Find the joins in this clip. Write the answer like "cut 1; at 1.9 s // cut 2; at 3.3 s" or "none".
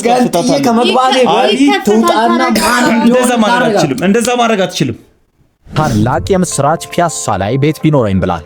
cut 1; at 5.8 s